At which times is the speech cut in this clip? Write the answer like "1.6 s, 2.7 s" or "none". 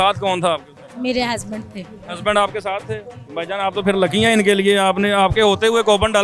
none

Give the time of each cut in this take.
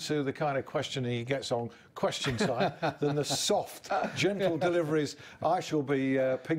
none

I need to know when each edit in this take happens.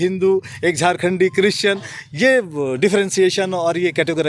none

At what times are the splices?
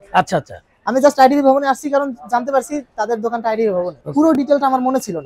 4.0 s

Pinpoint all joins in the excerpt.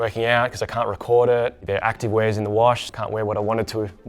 2.9 s

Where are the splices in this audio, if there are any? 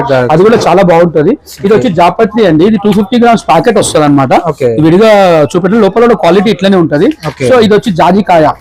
none

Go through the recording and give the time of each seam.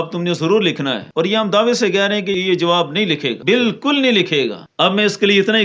1.0 s, 2.4 s, 3.3 s, 4.6 s

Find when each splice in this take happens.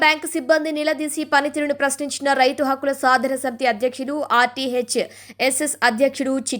none

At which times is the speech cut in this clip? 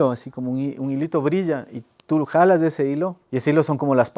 3.2 s

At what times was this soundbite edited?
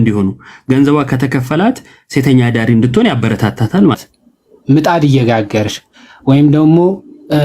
4.0 s

